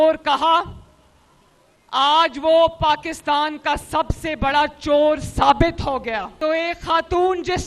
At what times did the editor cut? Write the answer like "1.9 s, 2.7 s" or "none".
6.3 s